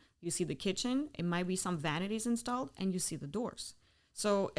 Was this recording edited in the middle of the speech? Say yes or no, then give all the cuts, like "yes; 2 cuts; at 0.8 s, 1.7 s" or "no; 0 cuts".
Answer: no; 0 cuts